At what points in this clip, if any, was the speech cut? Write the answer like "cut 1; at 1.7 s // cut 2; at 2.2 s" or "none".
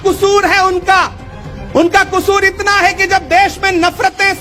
none